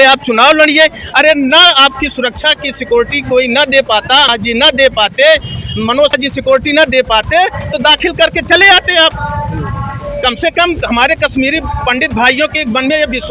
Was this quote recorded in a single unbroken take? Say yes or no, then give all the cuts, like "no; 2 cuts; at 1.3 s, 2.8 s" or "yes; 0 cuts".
yes; 0 cuts